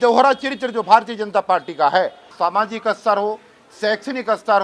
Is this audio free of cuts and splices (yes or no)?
no